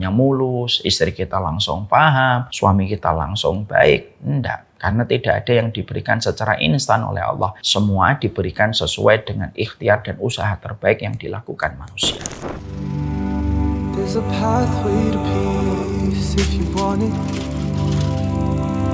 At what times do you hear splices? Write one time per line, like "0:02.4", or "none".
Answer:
0:02.5
0:07.6
0:12.6